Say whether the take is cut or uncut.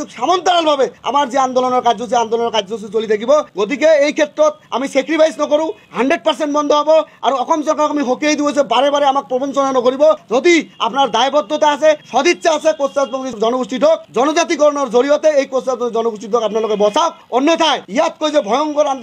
uncut